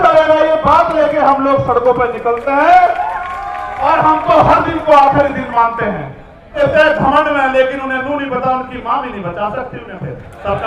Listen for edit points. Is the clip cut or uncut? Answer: cut